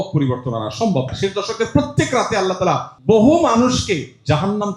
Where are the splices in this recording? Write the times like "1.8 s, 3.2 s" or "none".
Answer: 1.1 s, 2.9 s